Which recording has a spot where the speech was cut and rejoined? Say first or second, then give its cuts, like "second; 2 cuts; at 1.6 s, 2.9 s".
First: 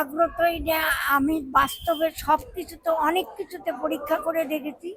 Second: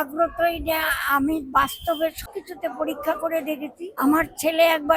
second; 2 cuts; at 2.2 s, 3.9 s